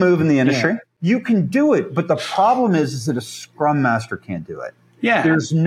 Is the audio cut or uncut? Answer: cut